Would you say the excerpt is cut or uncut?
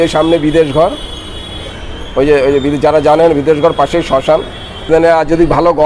cut